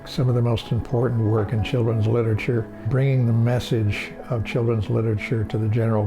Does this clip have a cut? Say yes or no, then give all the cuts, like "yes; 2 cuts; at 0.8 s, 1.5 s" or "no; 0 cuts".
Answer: yes; 1 cut; at 2.9 s